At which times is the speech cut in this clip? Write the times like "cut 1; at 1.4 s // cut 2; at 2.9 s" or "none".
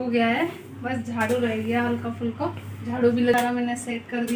cut 1; at 3.3 s